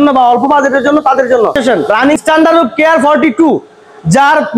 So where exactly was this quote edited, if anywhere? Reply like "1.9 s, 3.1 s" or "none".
2.2 s